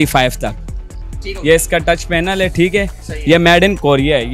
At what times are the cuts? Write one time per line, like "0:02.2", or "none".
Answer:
0:03.0